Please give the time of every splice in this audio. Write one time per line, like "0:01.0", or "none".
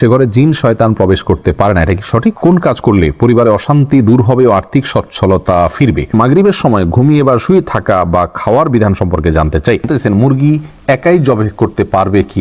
0:02.4
0:06.1
0:09.9